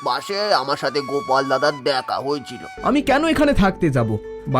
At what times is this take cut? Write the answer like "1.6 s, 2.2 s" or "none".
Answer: 2.7 s